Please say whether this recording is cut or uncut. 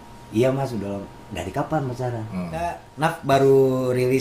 cut